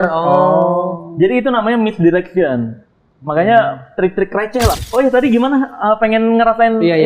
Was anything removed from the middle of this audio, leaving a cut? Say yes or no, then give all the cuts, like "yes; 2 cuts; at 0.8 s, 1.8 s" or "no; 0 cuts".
yes; 1 cut; at 4.8 s